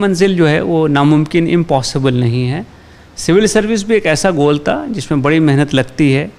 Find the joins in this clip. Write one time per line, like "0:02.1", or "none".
none

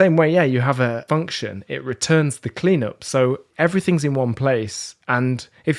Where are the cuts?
0:01.0
0:03.5

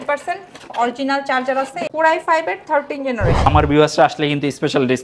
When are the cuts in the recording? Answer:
0:01.9
0:03.4

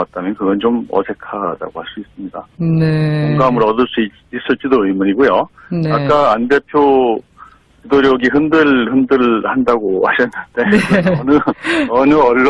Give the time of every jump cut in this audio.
0:10.9

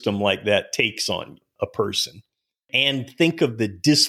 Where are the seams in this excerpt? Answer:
0:01.4
0:02.7

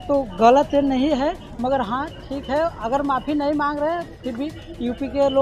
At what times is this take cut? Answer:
none

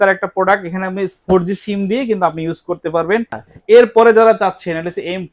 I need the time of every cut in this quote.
0:03.4

